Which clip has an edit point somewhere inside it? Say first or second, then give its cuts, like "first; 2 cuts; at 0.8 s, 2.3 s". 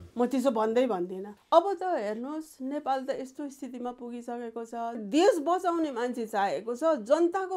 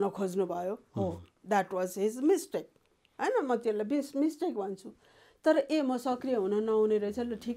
first; 2 cuts; at 1.3 s, 5.0 s